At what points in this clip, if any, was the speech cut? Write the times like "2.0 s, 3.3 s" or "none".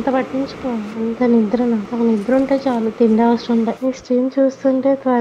0.9 s, 1.9 s, 3.8 s